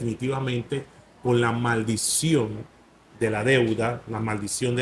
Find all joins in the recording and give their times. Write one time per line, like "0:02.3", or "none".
none